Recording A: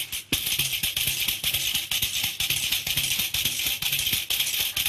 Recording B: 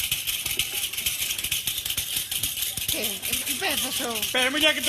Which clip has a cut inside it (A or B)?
B